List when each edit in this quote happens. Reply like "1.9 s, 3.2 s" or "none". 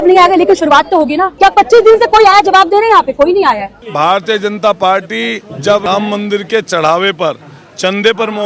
1.2 s, 3.8 s, 5.8 s